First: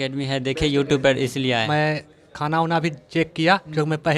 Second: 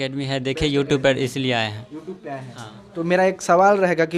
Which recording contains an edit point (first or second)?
first